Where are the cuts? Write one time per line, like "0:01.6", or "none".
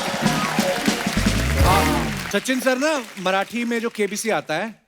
0:02.2